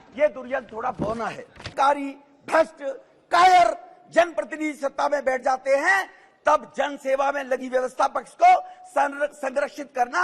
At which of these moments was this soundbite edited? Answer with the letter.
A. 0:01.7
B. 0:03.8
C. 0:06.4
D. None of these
A